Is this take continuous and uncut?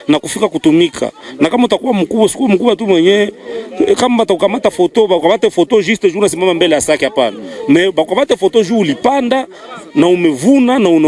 yes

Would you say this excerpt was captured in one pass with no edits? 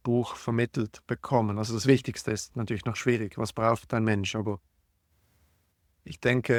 yes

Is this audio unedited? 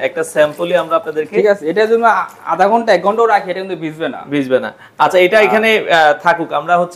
yes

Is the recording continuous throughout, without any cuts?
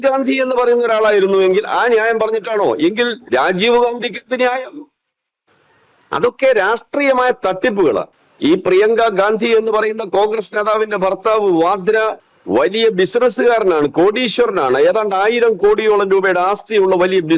no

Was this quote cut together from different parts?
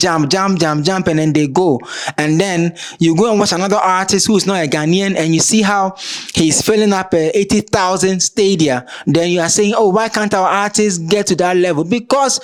no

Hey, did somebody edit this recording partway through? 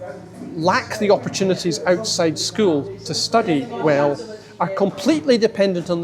no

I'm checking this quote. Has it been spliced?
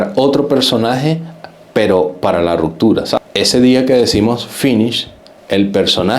yes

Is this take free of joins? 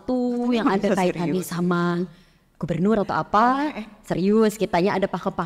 yes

